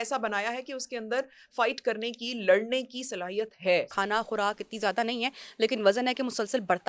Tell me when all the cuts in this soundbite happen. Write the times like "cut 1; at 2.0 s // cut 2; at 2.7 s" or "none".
cut 1; at 3.9 s